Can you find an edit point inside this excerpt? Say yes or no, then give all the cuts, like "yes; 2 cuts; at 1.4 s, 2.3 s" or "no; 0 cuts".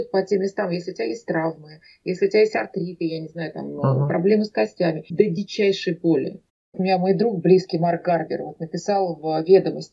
yes; 2 cuts; at 5.0 s, 6.7 s